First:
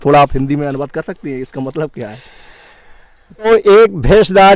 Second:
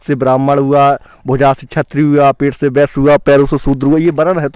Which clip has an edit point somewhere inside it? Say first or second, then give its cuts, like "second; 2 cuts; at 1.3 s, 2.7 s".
first; 1 cut; at 3.5 s